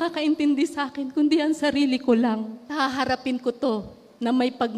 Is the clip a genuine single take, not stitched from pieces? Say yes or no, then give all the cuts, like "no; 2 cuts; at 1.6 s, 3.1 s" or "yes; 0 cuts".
no; 1 cut; at 2.6 s